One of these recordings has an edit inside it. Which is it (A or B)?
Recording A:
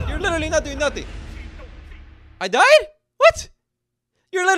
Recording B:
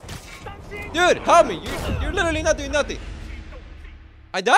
B